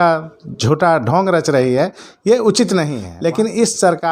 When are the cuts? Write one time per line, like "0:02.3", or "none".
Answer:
0:03.0